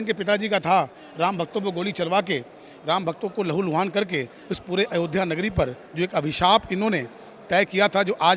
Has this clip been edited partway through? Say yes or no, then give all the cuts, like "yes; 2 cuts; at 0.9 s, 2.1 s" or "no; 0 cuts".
no; 0 cuts